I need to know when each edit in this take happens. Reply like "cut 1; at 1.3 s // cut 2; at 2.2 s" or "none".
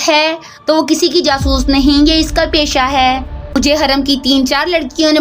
cut 1; at 3.6 s